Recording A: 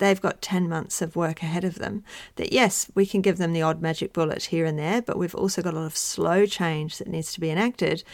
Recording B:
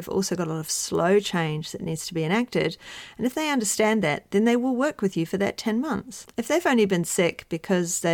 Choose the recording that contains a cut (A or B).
B